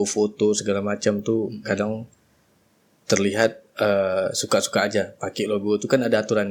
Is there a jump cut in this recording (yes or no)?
no